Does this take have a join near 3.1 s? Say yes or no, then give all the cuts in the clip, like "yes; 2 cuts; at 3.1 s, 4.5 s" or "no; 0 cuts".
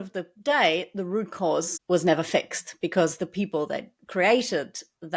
no; 1 cut; at 1.7 s